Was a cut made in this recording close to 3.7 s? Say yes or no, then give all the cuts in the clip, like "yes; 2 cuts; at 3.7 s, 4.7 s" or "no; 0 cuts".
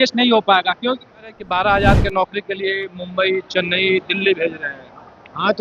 no; 1 cut; at 1.4 s